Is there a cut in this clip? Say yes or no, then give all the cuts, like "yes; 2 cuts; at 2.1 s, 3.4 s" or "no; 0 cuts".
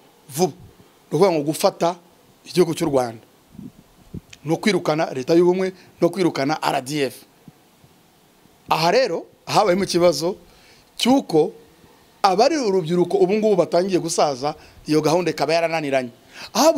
no; 0 cuts